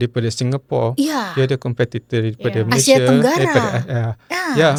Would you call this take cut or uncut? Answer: uncut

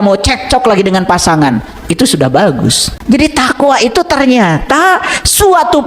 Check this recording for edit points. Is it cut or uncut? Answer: cut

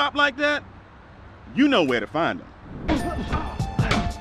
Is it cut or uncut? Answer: cut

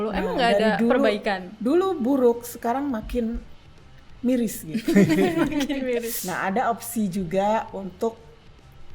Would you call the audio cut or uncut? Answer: cut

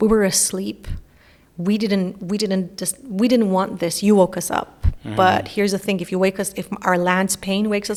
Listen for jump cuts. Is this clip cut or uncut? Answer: uncut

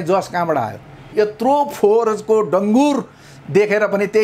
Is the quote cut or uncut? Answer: cut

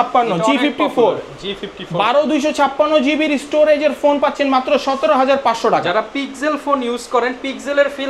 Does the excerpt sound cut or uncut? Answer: uncut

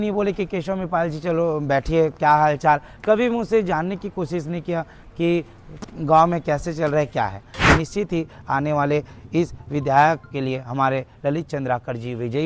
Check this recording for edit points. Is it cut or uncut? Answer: cut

